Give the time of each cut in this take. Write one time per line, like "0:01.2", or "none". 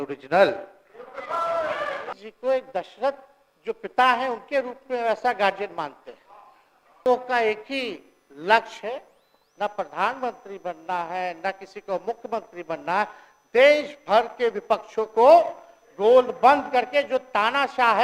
0:02.2
0:07.1